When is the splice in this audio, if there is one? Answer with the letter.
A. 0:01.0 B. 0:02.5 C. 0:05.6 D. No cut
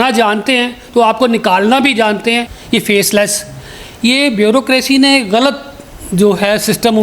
B